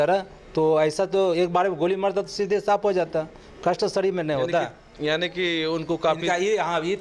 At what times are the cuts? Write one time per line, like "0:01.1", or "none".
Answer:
none